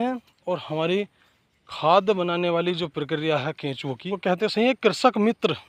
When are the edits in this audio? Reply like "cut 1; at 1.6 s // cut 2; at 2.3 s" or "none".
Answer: cut 1; at 4.0 s